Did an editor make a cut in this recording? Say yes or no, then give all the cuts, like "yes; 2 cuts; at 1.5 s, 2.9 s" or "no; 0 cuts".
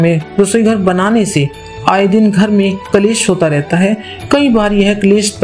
no; 0 cuts